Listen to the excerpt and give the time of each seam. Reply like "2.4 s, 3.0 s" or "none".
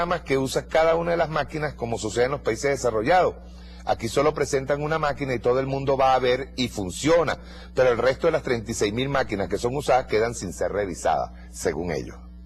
5.3 s